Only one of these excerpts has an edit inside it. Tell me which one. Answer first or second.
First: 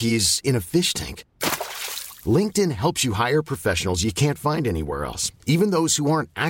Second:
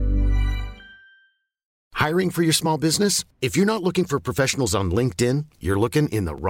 second